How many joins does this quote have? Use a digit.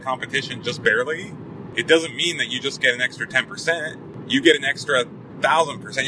2